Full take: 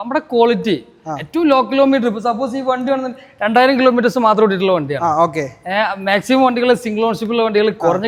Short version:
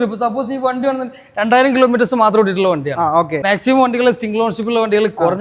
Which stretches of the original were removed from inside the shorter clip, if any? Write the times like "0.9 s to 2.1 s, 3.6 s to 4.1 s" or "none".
5.4 s to 6.0 s